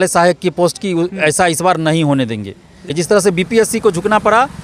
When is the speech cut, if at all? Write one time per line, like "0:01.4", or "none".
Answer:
0:02.9